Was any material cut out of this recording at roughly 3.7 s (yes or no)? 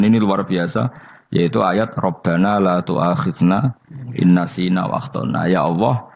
no